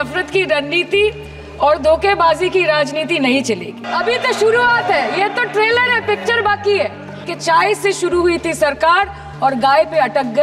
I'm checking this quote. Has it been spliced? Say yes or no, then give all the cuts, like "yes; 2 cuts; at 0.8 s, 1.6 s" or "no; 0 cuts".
yes; 2 cuts; at 3.9 s, 7.3 s